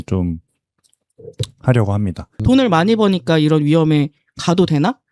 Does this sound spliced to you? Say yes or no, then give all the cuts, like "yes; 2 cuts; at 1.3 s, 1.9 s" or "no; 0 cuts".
yes; 1 cut; at 2.4 s